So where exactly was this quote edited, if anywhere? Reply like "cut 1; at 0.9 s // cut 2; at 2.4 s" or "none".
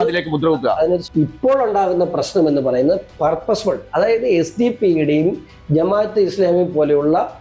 cut 1; at 1.0 s